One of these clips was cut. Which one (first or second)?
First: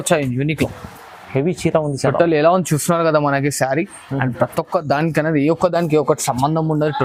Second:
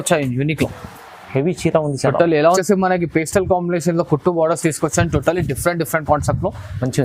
second